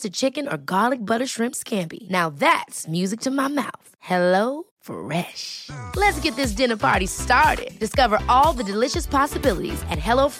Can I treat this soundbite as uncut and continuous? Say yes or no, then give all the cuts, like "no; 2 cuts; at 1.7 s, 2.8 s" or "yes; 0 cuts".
yes; 0 cuts